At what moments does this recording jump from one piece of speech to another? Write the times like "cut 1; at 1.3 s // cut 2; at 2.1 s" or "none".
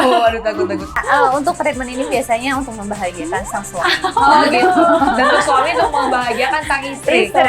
cut 1; at 1.0 s